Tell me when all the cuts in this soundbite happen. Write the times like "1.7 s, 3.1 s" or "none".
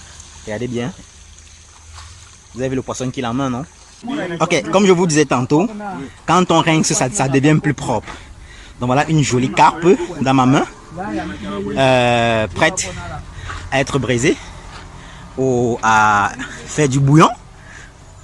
4.0 s